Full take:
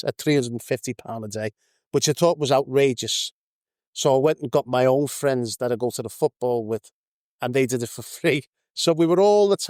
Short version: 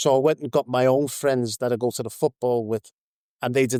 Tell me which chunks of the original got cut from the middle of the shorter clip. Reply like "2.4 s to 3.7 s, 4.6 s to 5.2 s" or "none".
none